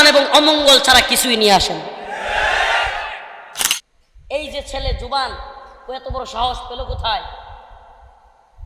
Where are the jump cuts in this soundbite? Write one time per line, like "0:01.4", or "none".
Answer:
0:03.6